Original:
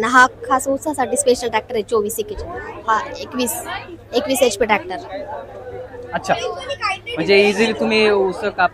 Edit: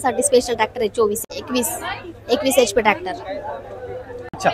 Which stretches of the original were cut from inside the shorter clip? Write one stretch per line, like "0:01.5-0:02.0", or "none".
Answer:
0:02.2-0:03.1